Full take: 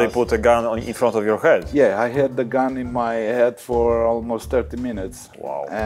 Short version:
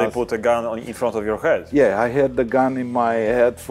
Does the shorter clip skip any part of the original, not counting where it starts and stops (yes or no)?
no